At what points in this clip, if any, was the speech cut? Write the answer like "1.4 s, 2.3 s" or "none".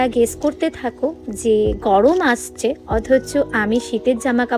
none